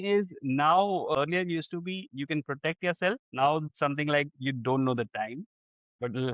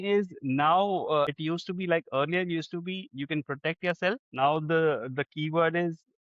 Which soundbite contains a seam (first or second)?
first